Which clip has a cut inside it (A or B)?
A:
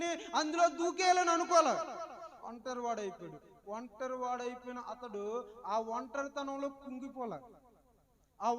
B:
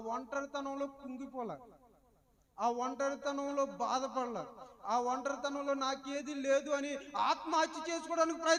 A